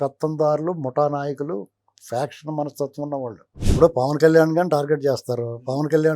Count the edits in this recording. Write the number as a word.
one